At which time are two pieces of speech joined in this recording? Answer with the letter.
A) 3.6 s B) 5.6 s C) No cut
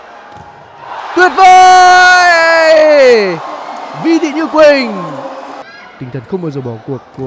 B